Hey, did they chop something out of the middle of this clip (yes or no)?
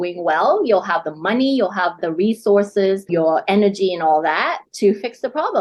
no